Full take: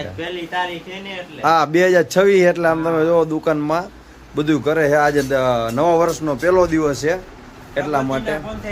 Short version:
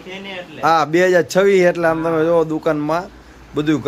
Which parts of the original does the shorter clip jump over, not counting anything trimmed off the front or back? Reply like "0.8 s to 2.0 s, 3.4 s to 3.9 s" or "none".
none